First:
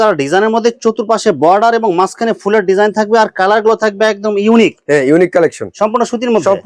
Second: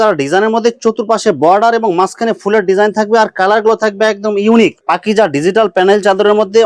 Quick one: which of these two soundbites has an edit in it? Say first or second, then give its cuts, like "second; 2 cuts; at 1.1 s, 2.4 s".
second; 1 cut; at 4.8 s